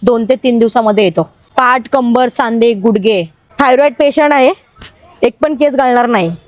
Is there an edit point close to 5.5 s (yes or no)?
no